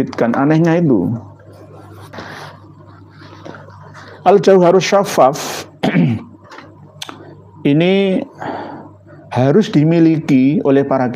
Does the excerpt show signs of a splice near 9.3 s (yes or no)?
no